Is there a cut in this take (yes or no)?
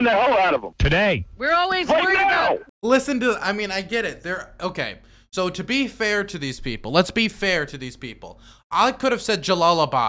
yes